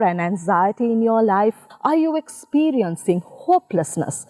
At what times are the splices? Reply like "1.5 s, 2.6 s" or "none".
1.7 s